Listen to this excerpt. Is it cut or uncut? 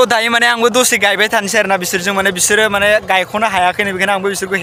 uncut